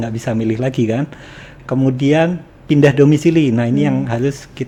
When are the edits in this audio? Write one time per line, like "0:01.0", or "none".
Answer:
none

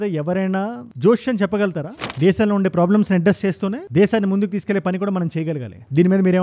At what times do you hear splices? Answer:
0:02.0

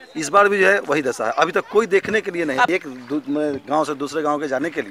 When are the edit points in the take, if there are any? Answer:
0:02.7

